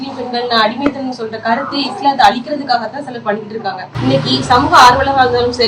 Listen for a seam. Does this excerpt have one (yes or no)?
no